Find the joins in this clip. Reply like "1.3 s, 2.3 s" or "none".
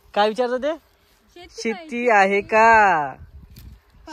none